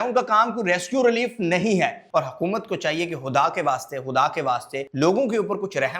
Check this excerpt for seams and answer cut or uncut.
cut